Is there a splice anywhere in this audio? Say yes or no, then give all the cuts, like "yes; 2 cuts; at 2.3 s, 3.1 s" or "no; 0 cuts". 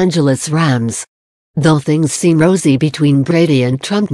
yes; 1 cut; at 1.7 s